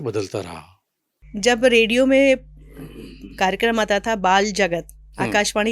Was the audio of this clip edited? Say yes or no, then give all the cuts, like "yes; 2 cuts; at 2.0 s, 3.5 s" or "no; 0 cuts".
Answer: yes; 1 cut; at 1.2 s